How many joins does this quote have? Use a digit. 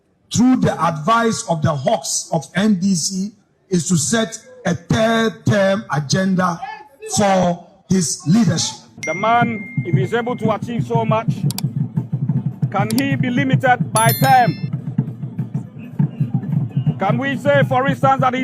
1